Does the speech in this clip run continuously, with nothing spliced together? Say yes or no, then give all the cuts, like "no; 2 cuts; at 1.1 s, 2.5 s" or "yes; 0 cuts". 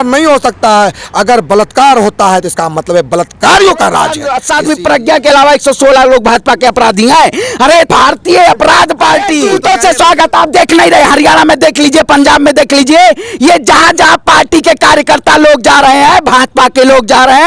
no; 3 cuts; at 4.3 s, 7.9 s, 9.4 s